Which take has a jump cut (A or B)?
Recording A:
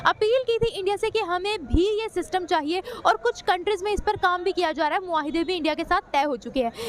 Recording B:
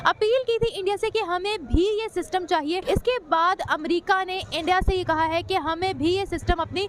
B